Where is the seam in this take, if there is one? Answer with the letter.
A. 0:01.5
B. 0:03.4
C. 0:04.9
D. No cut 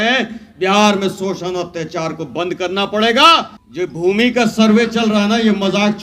B